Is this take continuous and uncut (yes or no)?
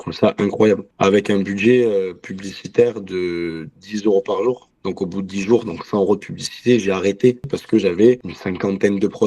no